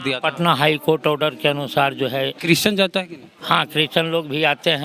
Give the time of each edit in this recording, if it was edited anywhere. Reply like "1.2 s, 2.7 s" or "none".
2.4 s